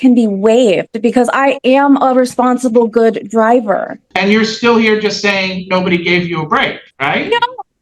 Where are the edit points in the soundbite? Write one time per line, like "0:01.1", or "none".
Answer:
0:04.0
0:06.8